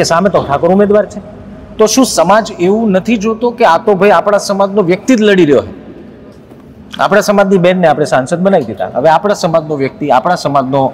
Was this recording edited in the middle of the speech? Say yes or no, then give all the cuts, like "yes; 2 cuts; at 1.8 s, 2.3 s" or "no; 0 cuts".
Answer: no; 0 cuts